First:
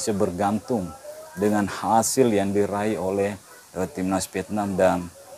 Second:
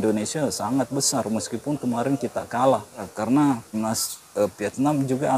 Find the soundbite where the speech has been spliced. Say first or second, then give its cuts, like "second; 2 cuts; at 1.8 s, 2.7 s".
second; 2 cuts; at 3.1 s, 3.8 s